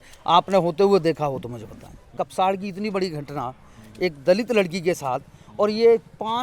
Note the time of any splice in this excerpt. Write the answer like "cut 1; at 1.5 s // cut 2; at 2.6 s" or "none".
cut 1; at 2.1 s

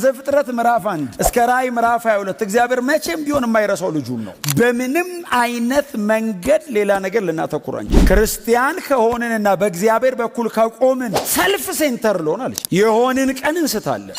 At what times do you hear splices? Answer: cut 1; at 4.3 s

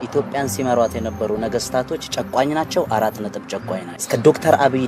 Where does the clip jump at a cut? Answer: cut 1; at 3.9 s

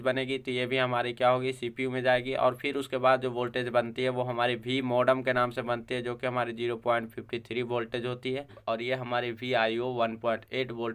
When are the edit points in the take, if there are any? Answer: cut 1; at 8.6 s

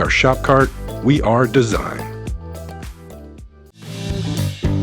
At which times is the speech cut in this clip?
cut 1; at 3.9 s

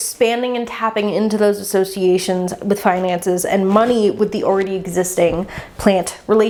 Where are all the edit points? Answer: none

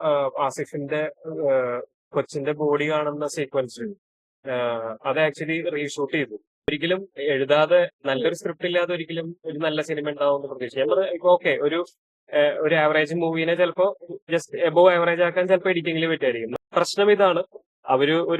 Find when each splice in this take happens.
cut 1; at 6.7 s // cut 2; at 16.6 s

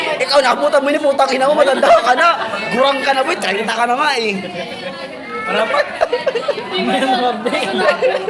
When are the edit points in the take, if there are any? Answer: none

